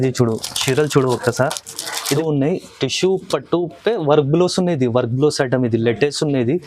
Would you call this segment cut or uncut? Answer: cut